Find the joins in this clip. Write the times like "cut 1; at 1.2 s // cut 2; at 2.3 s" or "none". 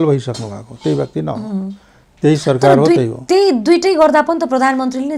none